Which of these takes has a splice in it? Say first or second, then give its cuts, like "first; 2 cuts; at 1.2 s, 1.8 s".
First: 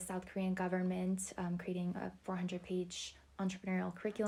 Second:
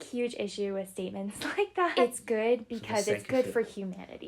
second; 1 cut; at 1.9 s